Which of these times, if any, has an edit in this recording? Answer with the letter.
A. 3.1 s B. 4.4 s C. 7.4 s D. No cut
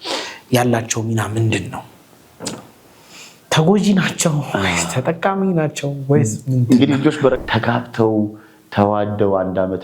C